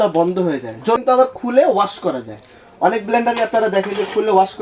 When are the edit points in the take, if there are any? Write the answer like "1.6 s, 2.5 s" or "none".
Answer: 1.0 s